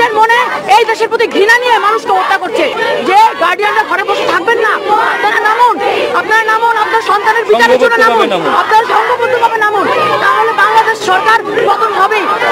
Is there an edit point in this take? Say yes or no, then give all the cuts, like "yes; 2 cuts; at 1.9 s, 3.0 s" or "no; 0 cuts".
yes; 1 cut; at 2.7 s